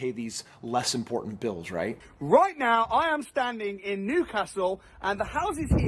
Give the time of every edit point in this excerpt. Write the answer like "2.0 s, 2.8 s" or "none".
2.1 s

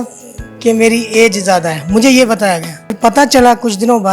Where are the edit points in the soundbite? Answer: 2.9 s

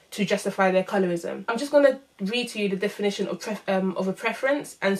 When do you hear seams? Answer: none

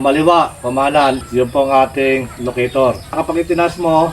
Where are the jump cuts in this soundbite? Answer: 1.2 s, 3.2 s

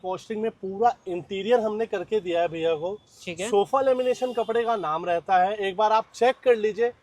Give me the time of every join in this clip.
none

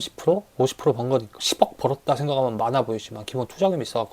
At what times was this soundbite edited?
1.4 s

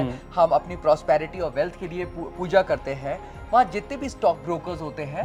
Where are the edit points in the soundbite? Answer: none

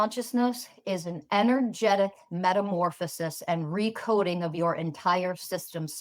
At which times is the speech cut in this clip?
none

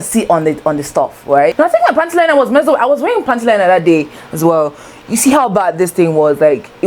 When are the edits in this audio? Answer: 1.5 s

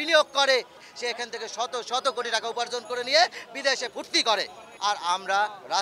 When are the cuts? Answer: 0.9 s, 4.6 s

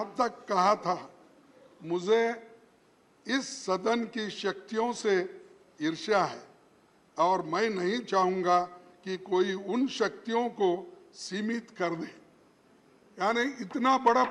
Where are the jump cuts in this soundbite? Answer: none

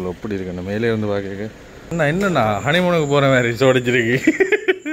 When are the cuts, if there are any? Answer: 1.9 s

